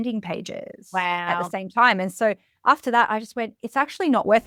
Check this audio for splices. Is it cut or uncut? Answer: uncut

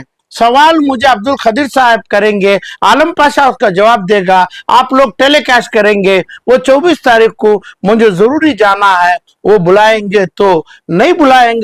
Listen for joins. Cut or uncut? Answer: uncut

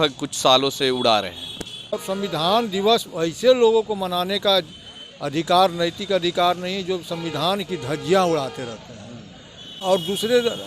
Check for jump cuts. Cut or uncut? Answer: cut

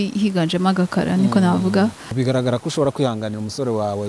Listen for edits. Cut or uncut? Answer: cut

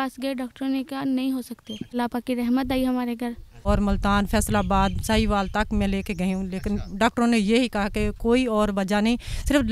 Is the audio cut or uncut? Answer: cut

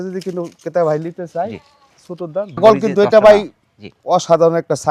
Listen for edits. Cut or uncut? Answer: cut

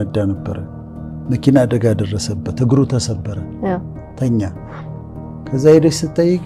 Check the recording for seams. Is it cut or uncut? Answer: uncut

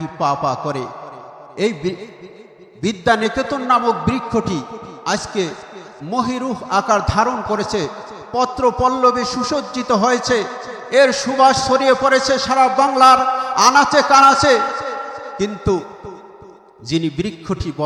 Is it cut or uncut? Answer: uncut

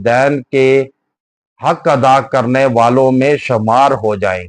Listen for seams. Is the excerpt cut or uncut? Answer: uncut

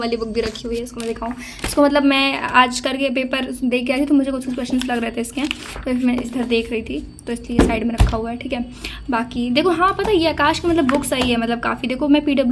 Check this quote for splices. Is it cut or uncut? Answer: uncut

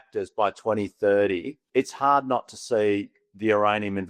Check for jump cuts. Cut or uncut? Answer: cut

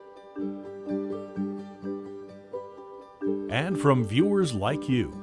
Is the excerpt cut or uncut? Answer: cut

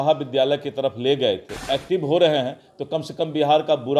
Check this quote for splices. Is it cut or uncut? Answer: cut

